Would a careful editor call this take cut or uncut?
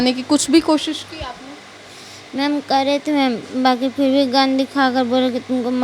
uncut